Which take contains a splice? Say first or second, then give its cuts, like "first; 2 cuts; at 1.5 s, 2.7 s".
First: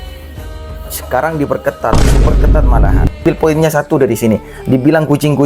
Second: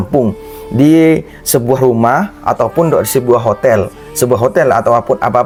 first; 1 cut; at 3.2 s